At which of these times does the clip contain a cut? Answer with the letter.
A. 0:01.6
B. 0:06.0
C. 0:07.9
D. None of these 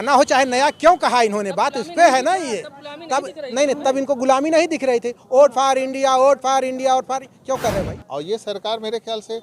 C